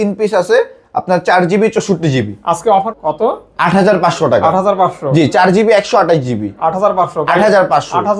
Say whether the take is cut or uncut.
cut